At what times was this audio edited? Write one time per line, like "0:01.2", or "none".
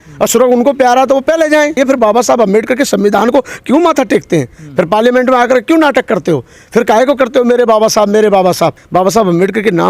0:01.8
0:08.8